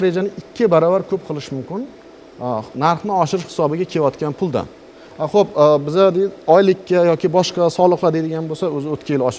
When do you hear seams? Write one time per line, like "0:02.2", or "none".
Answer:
none